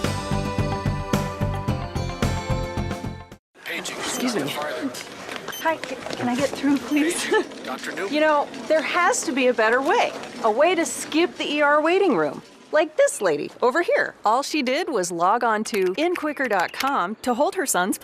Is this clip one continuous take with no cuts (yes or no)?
no